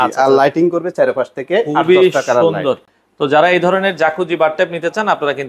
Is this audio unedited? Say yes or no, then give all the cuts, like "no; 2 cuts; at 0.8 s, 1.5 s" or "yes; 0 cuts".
yes; 0 cuts